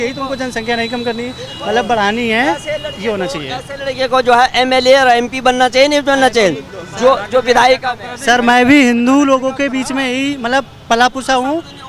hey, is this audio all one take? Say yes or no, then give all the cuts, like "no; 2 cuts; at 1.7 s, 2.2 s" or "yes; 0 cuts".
yes; 0 cuts